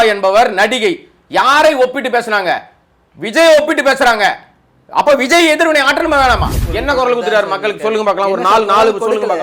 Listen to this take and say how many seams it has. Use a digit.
1